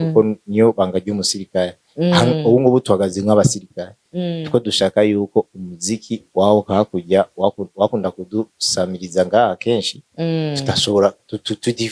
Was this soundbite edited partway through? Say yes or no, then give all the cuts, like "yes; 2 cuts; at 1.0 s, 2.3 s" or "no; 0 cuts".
no; 0 cuts